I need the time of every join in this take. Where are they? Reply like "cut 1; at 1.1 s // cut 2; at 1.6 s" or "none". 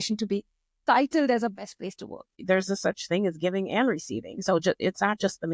cut 1; at 2.3 s